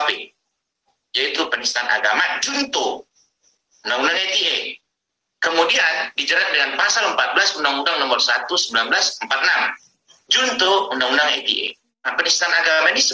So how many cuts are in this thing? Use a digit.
1